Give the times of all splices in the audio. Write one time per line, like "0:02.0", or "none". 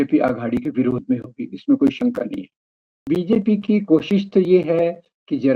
0:03.1